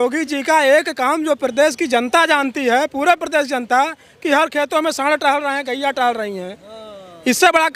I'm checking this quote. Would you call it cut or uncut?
uncut